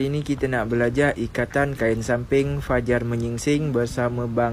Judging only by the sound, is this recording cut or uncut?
uncut